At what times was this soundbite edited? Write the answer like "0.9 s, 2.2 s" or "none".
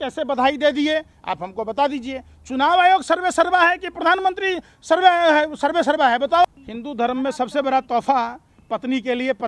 6.4 s